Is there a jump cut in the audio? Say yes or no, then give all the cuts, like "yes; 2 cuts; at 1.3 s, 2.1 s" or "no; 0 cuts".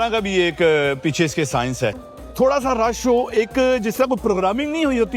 yes; 1 cut; at 2.1 s